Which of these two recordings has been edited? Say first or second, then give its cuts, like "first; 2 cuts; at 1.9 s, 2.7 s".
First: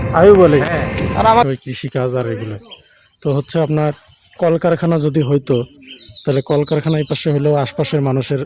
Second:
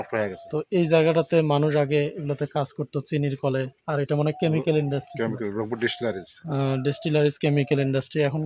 first; 1 cut; at 1.5 s